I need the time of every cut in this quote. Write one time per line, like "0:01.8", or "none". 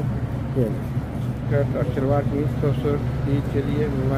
0:01.5